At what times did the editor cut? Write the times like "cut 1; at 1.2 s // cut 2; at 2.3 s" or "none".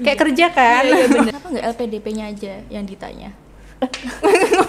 cut 1; at 1.3 s